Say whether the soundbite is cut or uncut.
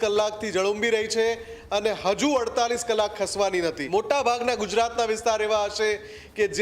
cut